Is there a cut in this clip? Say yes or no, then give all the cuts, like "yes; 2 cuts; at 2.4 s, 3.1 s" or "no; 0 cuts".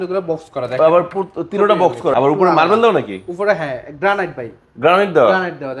yes; 1 cut; at 2.1 s